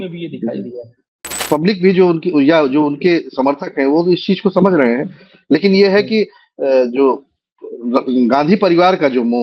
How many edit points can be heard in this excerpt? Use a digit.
1